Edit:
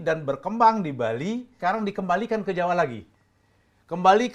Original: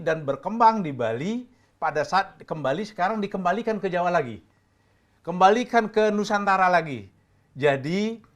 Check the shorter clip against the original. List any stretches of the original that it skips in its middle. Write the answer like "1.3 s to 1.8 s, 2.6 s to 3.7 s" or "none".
1.5 s to 2.9 s